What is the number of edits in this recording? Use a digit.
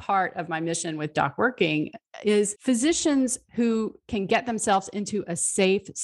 1